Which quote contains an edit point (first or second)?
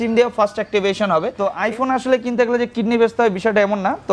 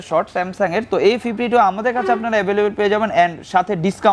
first